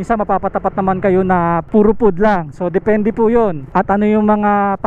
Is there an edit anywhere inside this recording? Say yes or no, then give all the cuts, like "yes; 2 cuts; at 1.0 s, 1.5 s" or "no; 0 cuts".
yes; 2 cuts; at 1.6 s, 3.6 s